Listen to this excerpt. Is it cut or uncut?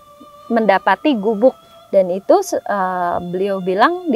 cut